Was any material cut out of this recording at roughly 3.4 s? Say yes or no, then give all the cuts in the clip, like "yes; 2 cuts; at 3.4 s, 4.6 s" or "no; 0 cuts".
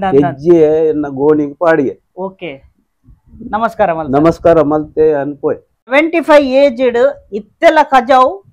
no; 1 cut; at 5.9 s